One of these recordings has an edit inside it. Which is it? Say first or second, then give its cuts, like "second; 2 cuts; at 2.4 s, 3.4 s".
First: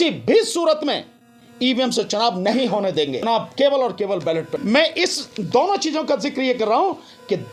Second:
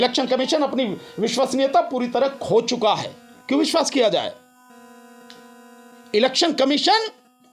first; 2 cuts; at 3.2 s, 4.5 s